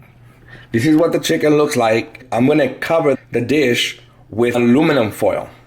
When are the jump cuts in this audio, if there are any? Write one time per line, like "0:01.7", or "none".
0:02.2
0:03.2
0:04.5